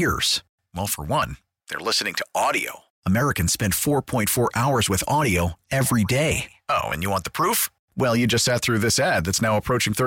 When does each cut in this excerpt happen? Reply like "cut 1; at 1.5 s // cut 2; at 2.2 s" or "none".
none